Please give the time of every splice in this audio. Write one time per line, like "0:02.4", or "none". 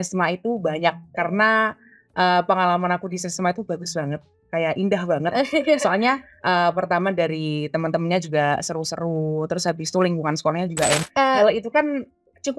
0:11.0